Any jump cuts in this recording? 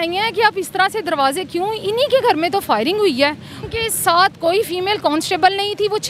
yes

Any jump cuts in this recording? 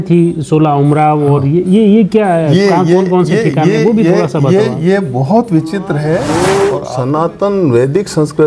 yes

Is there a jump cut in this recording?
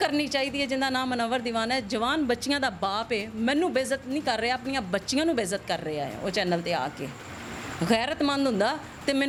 no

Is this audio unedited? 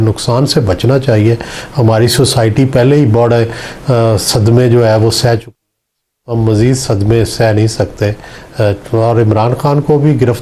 yes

